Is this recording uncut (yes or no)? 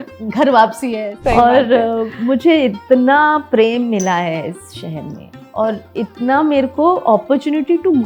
no